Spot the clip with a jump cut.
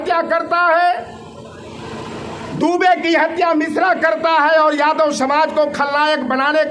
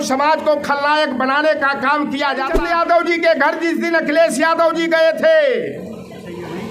second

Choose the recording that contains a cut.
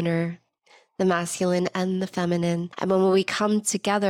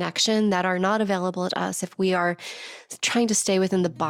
first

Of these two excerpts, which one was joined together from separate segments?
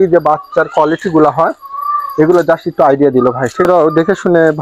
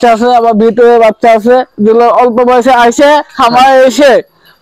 first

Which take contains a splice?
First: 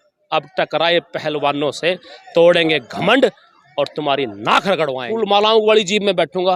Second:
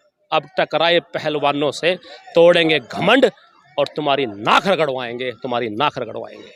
first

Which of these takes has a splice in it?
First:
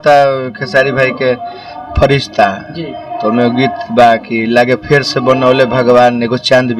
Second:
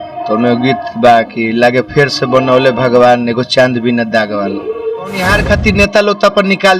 second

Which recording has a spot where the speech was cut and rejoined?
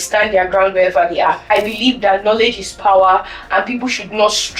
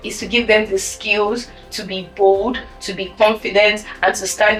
first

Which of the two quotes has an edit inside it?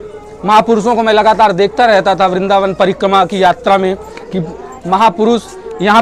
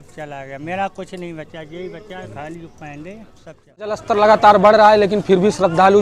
second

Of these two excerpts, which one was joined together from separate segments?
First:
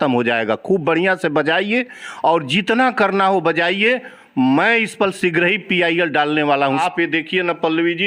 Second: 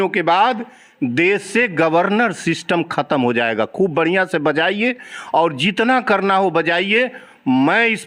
first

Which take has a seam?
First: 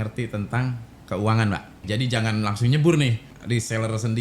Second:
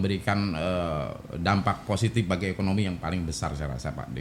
first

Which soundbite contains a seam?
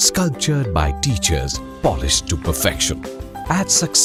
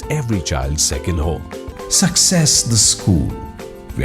second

